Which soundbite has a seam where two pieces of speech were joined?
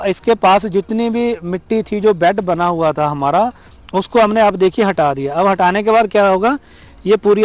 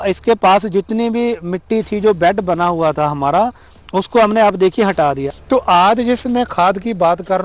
second; 1 cut; at 5.3 s

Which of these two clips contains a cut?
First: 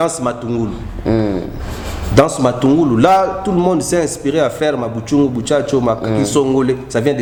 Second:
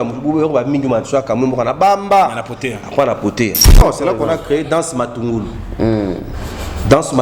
second; 1 cut; at 3.8 s

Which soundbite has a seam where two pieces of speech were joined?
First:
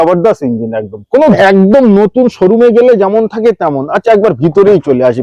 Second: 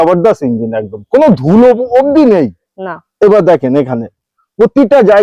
first; 1 cut; at 1.4 s

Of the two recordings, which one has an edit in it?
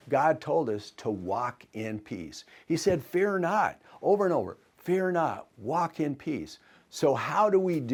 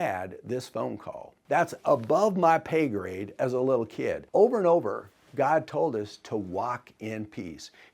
second; 2 cuts; at 1.3 s, 4.2 s

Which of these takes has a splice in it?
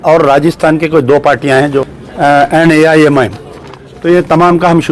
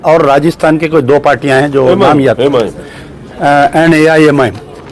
first; 1 cut; at 1.8 s

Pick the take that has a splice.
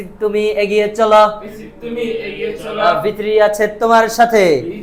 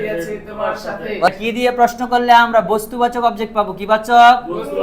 second; 1 cut; at 1.3 s

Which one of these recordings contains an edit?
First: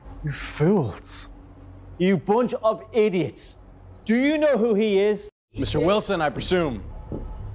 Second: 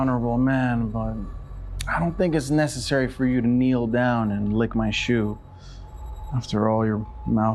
first; 1 cut; at 5.5 s

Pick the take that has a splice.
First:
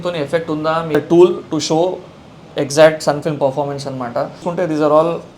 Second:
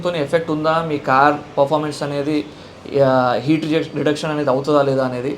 first; 2 cuts; at 1.0 s, 4.4 s

